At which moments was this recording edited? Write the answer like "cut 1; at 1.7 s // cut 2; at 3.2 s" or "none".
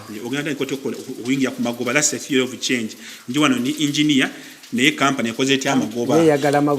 none